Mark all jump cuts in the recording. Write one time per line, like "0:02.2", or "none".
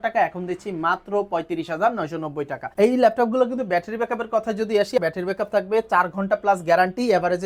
0:02.7
0:05.0